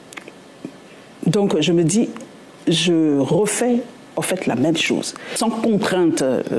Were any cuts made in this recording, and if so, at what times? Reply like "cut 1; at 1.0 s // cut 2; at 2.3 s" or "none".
cut 1; at 5.4 s